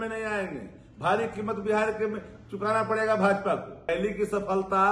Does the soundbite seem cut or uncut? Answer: cut